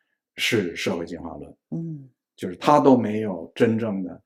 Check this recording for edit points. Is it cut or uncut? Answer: uncut